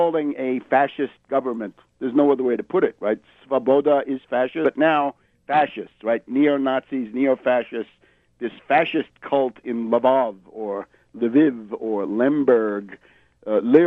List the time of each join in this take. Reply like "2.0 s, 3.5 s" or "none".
none